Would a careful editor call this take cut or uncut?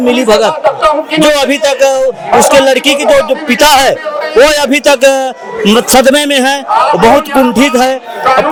uncut